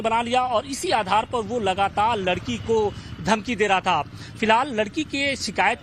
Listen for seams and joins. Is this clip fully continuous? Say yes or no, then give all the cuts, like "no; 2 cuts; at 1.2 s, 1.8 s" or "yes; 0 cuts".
no; 1 cut; at 1.5 s